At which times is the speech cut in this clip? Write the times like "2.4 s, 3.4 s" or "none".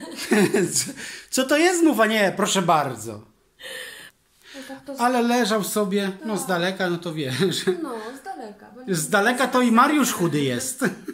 4.0 s